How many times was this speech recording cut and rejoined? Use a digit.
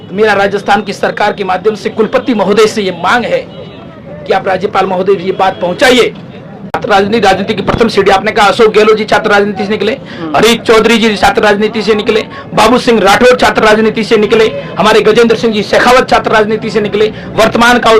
1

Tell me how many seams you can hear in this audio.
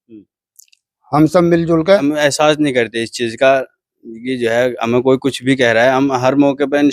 1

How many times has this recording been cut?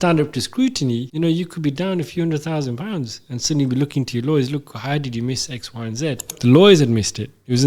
2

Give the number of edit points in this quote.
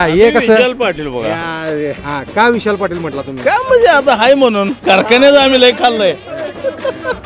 1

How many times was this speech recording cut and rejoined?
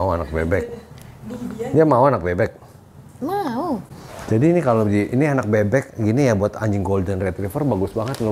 0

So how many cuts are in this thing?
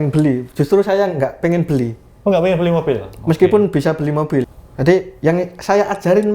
1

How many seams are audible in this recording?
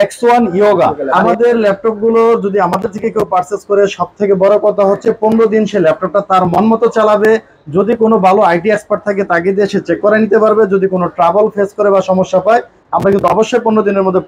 1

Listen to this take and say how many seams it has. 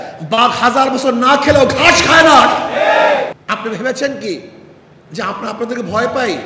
1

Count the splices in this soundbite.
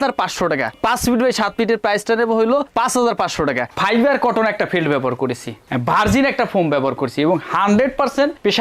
1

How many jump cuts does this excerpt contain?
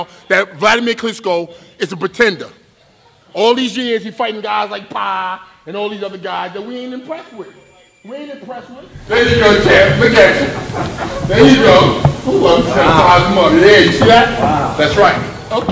0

